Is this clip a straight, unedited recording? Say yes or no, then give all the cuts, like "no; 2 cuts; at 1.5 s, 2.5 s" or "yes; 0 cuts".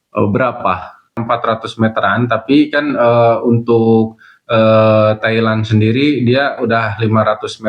no; 1 cut; at 1.2 s